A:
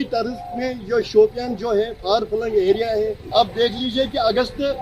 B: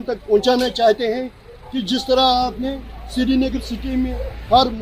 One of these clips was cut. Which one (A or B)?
A